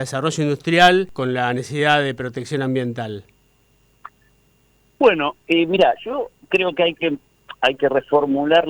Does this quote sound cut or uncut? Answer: cut